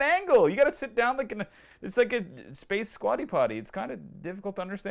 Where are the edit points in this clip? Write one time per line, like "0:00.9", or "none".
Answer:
none